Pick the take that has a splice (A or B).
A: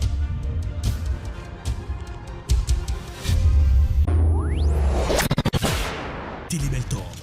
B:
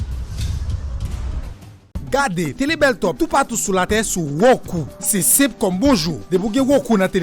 B